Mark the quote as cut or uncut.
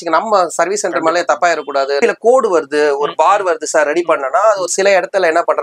cut